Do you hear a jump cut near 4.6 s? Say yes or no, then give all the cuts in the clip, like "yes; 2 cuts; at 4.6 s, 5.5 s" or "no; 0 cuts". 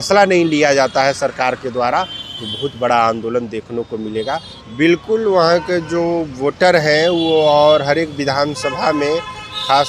yes; 1 cut; at 4.6 s